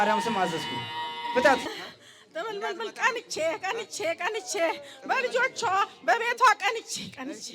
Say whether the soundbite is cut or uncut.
cut